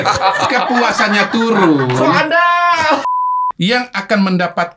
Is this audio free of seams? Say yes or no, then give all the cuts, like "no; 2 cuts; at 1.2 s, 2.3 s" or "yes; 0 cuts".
no; 1 cut; at 3.0 s